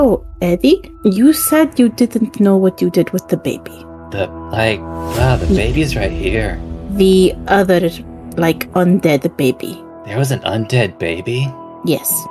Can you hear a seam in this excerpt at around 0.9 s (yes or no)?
yes